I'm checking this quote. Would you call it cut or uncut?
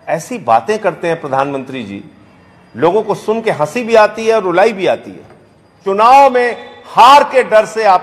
cut